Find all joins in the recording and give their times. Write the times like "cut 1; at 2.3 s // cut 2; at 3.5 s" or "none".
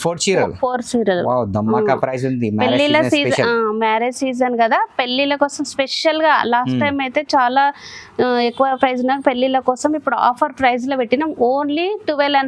none